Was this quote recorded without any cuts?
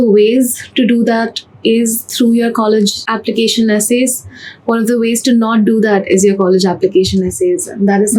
yes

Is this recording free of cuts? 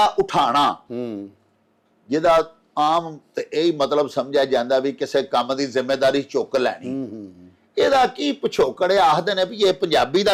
yes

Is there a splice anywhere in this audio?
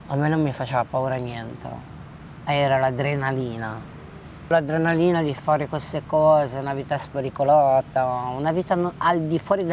yes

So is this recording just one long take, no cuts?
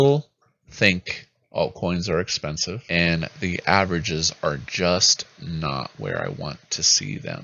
no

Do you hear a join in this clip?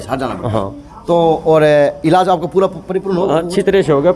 no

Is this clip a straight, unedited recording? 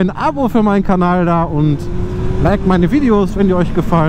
yes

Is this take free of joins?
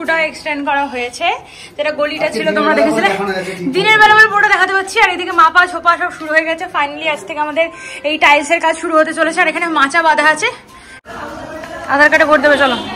no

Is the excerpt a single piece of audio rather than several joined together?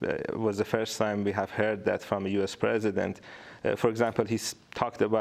yes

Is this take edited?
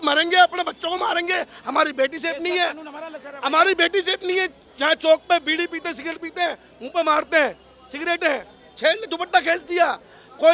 no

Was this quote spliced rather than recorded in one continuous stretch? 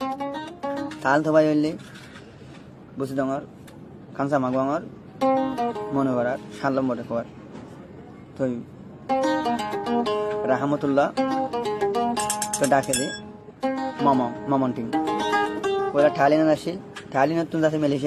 no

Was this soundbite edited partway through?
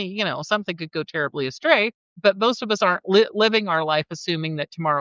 no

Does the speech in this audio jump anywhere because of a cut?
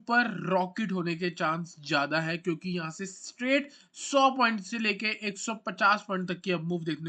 no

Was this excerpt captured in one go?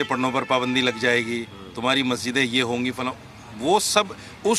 yes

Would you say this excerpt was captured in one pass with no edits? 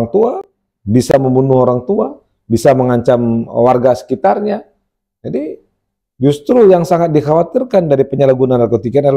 yes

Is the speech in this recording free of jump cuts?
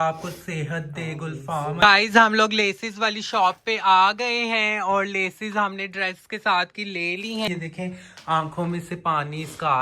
no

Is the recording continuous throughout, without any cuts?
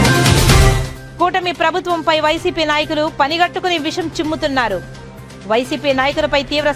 no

